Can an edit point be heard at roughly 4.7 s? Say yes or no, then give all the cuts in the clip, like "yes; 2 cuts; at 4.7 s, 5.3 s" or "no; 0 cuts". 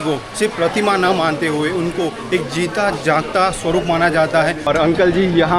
yes; 1 cut; at 4.7 s